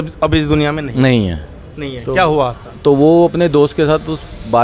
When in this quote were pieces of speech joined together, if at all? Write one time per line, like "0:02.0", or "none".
none